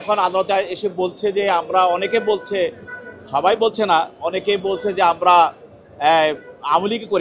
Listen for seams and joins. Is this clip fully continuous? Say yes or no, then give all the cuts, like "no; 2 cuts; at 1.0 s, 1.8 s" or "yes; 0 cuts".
yes; 0 cuts